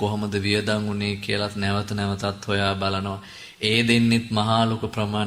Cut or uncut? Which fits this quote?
uncut